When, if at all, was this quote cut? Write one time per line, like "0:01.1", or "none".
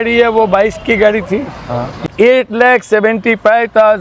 0:02.0